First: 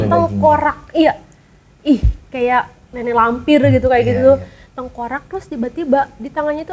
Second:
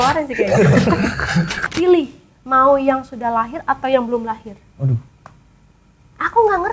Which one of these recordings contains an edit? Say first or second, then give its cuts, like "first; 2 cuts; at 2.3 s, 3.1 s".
second; 1 cut; at 1.6 s